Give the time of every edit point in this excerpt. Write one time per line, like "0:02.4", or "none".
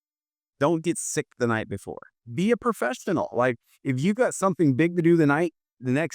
0:02.2